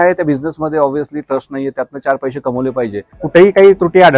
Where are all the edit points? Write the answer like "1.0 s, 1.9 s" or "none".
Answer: 3.1 s